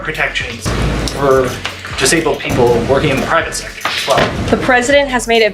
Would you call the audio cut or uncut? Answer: uncut